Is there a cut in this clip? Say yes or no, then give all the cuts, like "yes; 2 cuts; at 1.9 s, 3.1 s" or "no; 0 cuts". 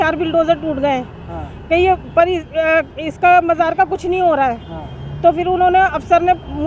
no; 0 cuts